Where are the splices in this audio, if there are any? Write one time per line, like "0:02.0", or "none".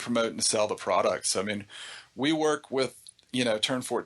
none